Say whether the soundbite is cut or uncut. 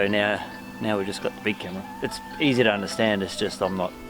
cut